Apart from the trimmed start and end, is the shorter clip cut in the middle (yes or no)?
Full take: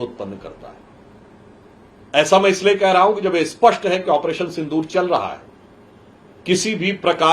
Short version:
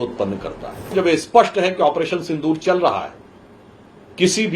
yes